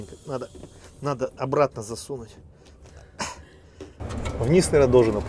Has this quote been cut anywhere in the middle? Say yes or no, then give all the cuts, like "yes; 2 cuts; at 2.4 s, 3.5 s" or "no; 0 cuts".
yes; 1 cut; at 4.0 s